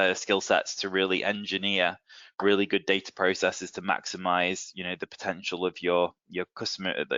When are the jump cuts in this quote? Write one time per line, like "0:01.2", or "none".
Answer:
none